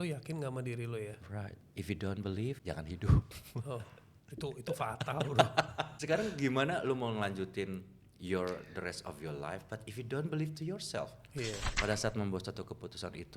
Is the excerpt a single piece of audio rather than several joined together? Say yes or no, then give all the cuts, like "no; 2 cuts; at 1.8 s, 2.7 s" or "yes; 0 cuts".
no; 3 cuts; at 2.6 s, 5.9 s, 11.7 s